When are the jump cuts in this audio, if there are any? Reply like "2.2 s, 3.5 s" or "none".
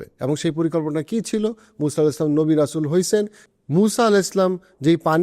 3.4 s

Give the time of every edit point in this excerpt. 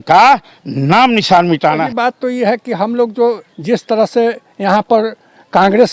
1.8 s

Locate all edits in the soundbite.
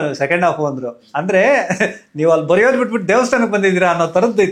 none

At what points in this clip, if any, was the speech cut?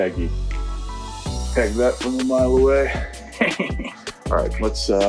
none

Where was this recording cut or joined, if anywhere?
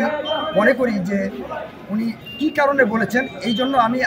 2.3 s

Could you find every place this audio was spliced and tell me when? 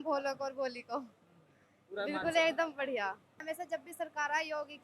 3.3 s

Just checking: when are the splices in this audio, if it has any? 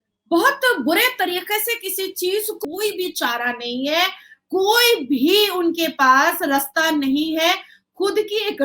2.6 s

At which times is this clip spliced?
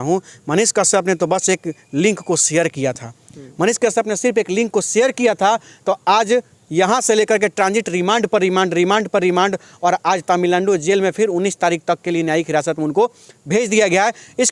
none

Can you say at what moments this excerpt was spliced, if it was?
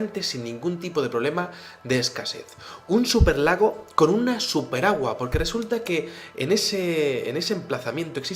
1.7 s

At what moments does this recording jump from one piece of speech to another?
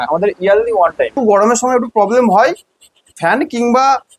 1.1 s

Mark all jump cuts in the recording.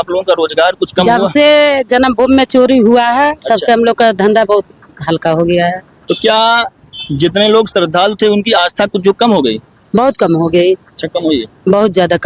none

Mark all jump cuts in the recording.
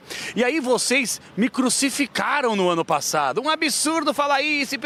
none

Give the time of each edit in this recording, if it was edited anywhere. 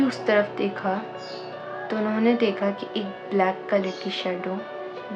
none

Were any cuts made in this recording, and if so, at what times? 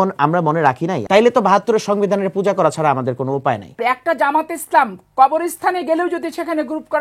1.0 s, 3.7 s

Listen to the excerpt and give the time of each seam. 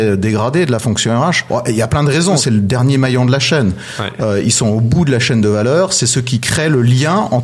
1.4 s, 2.4 s

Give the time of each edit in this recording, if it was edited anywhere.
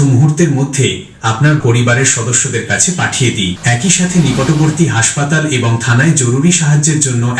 1.6 s, 3.6 s

